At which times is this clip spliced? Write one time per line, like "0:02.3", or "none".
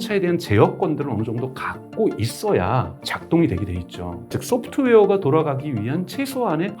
0:04.3